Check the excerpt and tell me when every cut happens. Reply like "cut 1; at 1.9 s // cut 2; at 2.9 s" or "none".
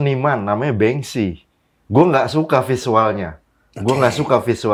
none